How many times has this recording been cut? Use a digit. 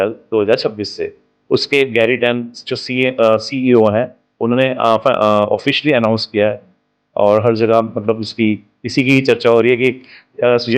0